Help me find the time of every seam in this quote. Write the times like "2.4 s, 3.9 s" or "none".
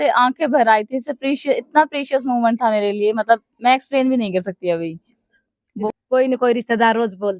5.9 s